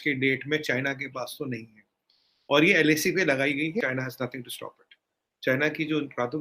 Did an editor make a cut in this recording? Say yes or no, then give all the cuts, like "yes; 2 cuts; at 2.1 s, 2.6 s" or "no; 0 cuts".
yes; 1 cut; at 3.8 s